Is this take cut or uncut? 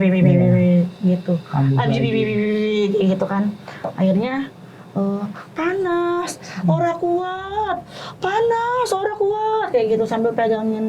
uncut